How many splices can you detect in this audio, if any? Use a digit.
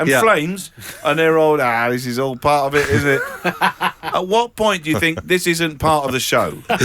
0